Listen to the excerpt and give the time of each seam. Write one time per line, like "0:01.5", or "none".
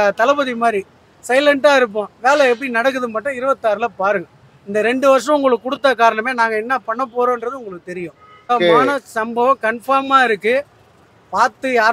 0:08.5